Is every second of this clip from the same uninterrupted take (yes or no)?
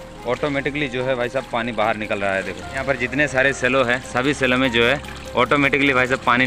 no